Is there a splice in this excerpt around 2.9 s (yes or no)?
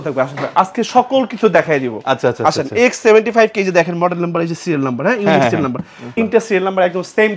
no